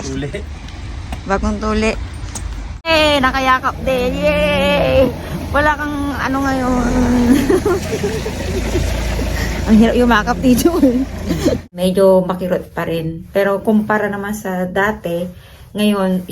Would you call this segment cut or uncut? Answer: cut